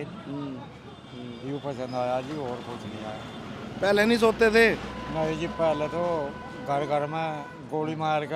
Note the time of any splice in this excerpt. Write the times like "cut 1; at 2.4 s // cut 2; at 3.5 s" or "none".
none